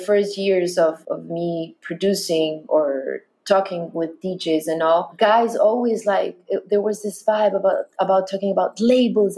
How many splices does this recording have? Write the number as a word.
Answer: two